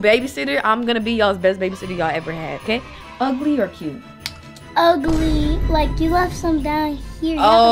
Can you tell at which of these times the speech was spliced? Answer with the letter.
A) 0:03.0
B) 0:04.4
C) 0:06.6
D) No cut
A